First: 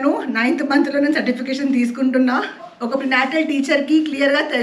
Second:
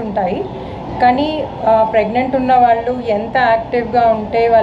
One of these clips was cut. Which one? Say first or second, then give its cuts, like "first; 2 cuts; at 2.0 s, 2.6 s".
first; 1 cut; at 2.7 s